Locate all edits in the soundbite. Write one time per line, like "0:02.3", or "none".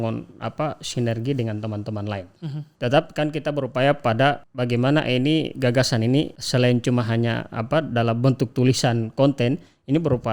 0:02.7
0:04.5
0:06.4